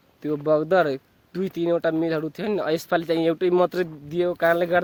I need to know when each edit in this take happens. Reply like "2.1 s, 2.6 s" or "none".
none

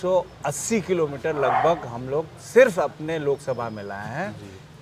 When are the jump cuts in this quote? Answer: none

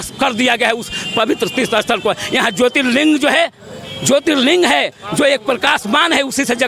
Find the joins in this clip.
none

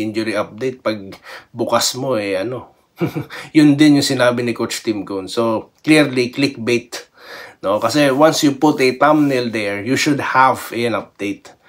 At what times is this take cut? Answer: none

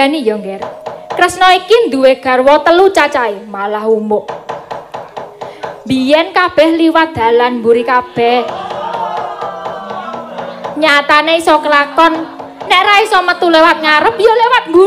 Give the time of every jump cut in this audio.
1.4 s

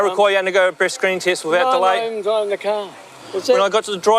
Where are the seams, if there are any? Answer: 3.2 s

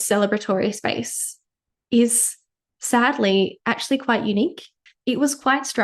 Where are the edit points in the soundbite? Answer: 4.8 s

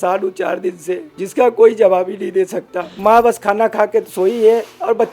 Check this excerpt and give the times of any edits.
1.1 s, 2.9 s

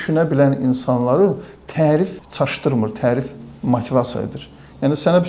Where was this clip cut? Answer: 2.2 s

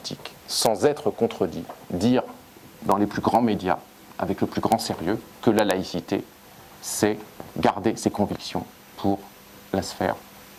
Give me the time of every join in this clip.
none

